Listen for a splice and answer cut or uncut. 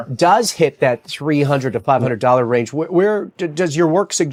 uncut